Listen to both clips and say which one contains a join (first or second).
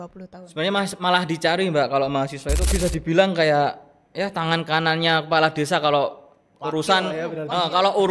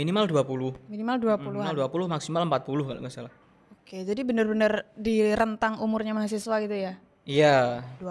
first